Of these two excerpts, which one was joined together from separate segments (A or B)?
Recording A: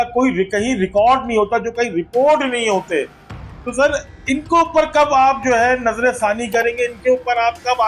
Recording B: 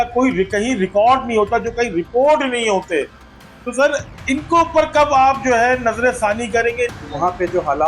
B